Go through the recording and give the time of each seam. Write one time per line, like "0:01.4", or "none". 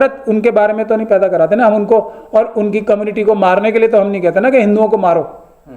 none